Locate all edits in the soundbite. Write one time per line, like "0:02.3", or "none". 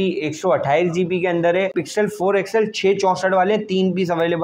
0:01.8

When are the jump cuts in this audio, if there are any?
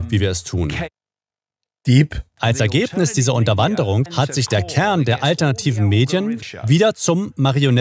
0:02.3
0:04.1
0:06.5

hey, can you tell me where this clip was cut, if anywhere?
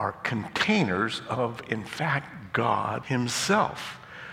0:03.0

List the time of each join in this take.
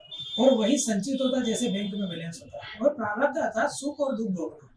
none

